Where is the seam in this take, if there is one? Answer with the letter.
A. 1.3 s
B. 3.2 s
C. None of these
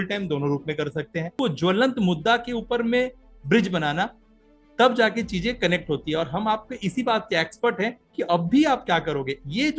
A